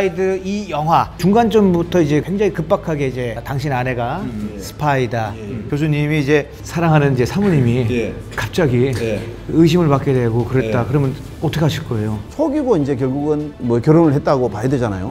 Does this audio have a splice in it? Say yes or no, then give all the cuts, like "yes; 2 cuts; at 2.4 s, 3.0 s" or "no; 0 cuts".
yes; 2 cuts; at 5.7 s, 12.3 s